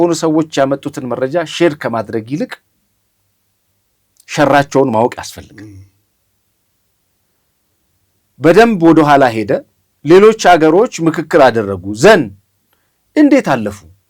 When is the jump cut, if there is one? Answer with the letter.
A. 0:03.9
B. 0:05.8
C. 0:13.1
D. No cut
D